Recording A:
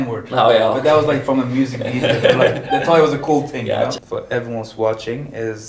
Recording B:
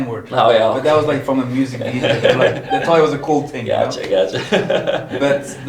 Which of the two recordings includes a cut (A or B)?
A